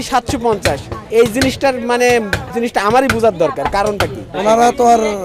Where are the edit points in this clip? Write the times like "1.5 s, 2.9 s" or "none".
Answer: 0.9 s, 2.4 s, 4.2 s